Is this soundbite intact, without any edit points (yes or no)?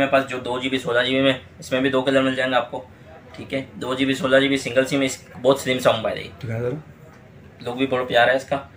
yes